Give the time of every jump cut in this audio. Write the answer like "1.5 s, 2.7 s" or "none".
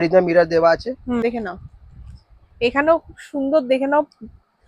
1.2 s